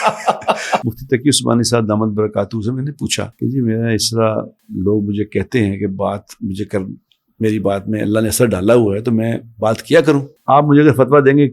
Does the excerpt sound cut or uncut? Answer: cut